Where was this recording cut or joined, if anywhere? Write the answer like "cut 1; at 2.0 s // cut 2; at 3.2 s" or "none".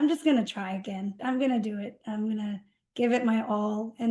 cut 1; at 1.2 s